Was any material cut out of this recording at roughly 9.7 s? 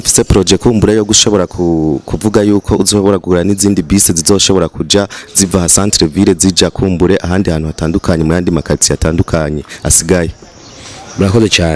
no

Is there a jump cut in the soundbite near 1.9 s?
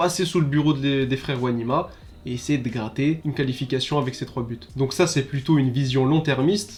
no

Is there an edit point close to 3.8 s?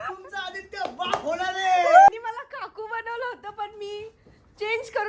no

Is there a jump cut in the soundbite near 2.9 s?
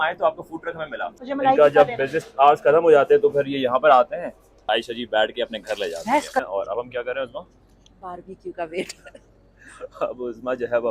no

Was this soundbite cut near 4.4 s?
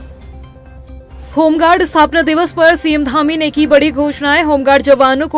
no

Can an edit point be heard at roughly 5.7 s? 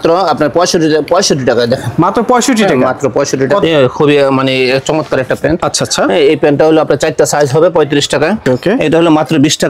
no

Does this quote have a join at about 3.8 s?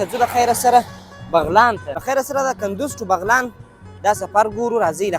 no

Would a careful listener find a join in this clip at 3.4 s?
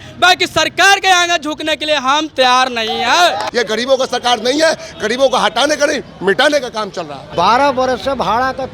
yes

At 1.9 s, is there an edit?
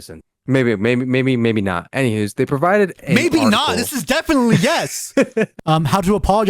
no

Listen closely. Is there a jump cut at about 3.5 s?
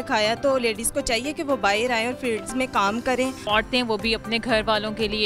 yes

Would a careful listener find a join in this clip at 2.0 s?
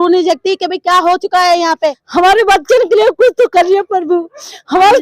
yes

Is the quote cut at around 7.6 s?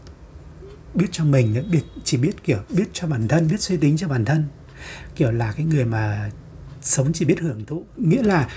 yes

